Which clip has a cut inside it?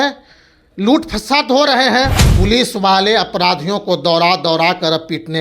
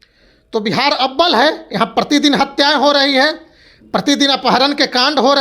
first; 1 cut; at 2.3 s

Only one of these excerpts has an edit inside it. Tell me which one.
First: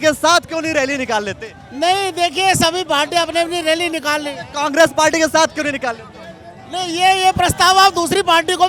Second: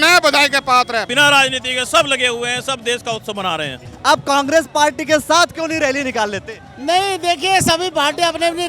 second; 2 cuts; at 1.1 s, 3.8 s

